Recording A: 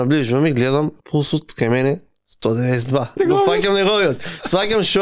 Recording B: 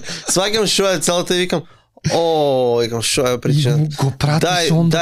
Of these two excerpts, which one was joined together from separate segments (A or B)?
A